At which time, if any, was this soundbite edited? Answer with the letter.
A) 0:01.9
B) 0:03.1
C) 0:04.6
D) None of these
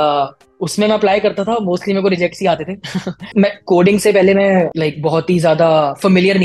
B